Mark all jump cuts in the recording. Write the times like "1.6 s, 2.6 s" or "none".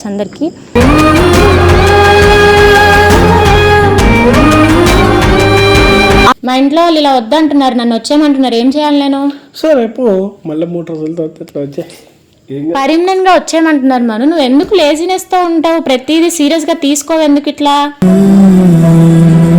6.4 s